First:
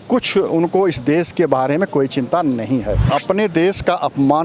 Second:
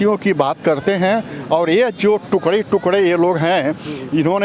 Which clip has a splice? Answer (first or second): first